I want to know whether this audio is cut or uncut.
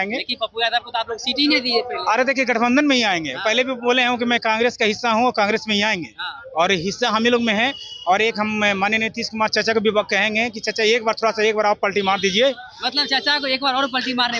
uncut